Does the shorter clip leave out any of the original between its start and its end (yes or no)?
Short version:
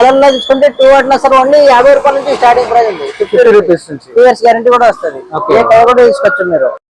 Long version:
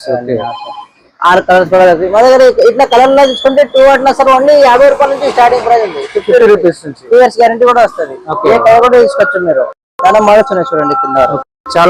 no